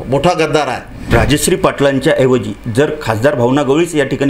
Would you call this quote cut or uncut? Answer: cut